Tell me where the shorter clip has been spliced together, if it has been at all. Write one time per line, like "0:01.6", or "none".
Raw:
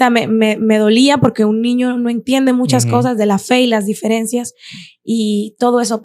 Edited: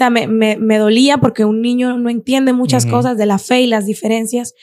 none